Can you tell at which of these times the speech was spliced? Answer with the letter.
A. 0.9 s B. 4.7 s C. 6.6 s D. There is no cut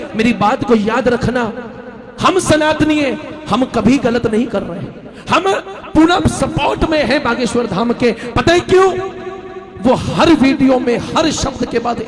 D